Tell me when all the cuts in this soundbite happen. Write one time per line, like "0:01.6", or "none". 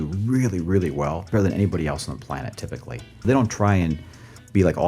0:03.2